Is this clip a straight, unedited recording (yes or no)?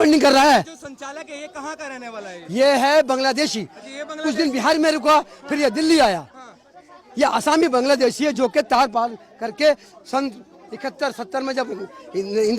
yes